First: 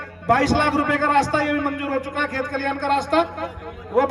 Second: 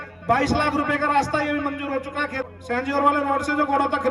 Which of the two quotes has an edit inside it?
second; 1 cut; at 2.5 s

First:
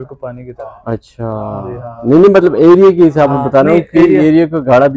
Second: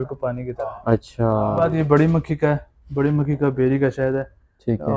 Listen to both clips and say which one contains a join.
second; 1 cut; at 1.7 s

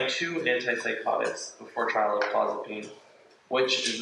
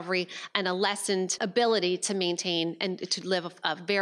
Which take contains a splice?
second; 1 cut; at 1.3 s

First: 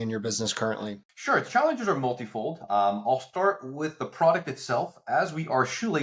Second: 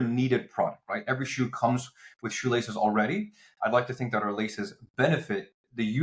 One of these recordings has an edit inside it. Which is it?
first; 1 cut; at 1.1 s

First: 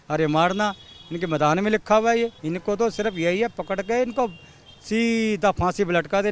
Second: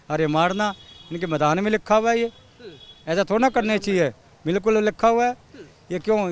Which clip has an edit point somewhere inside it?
first; 1 cut; at 2.5 s

